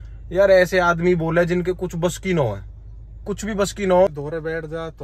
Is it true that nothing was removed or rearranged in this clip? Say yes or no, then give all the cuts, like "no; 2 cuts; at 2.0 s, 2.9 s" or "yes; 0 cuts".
no; 1 cut; at 4.1 s